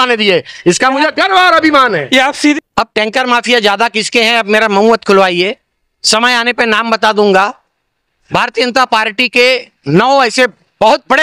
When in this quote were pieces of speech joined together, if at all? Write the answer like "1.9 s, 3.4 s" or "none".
2.5 s